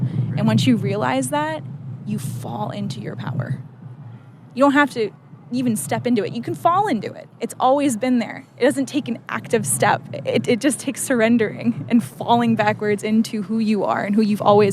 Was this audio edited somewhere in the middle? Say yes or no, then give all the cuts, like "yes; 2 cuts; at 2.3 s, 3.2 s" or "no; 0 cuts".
no; 0 cuts